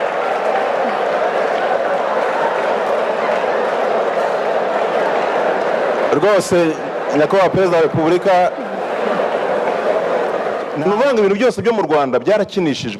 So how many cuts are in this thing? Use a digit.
1